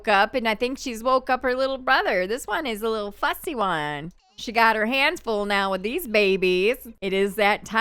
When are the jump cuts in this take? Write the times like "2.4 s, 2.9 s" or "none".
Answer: 4.2 s, 6.9 s